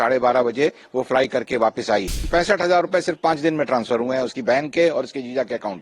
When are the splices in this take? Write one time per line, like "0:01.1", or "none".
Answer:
0:02.2